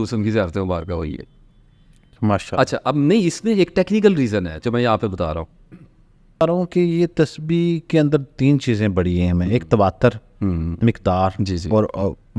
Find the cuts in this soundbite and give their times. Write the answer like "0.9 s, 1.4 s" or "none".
6.4 s